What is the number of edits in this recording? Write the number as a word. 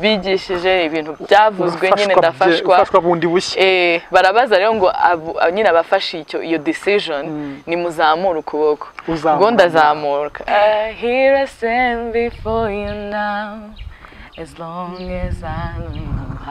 one